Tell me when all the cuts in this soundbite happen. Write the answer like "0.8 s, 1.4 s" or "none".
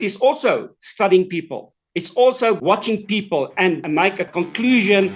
2.6 s, 4.1 s